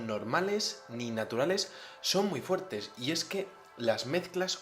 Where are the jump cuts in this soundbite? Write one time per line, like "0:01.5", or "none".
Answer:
0:01.1